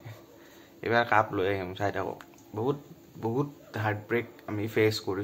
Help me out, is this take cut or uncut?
cut